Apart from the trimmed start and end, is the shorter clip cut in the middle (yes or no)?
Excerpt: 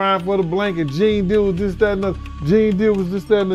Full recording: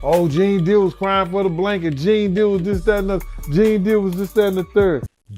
no